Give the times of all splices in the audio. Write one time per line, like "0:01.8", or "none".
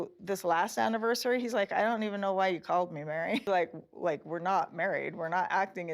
0:03.4